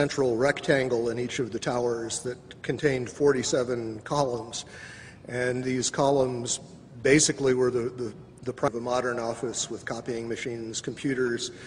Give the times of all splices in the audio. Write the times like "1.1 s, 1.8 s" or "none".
none